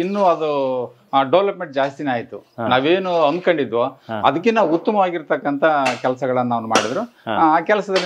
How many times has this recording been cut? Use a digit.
0